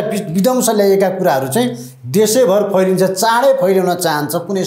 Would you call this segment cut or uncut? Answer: uncut